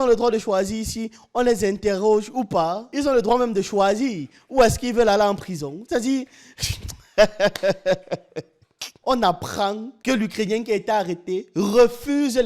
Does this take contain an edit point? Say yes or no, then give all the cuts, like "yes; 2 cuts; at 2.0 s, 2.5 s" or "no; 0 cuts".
yes; 1 cut; at 8.9 s